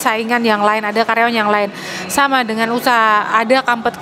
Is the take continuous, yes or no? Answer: yes